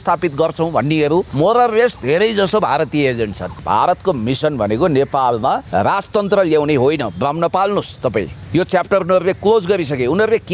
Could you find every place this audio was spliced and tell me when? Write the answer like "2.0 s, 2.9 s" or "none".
1.3 s, 3.6 s, 5.6 s, 8.4 s